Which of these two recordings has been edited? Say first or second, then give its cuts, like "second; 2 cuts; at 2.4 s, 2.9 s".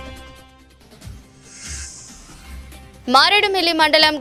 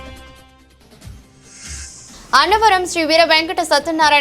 second; 1 cut; at 2.1 s